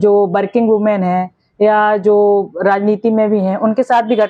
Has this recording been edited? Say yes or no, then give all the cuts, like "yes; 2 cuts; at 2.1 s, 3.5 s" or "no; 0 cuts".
no; 0 cuts